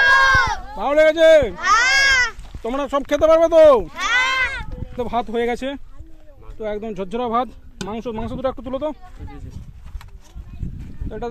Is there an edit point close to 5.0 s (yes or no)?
yes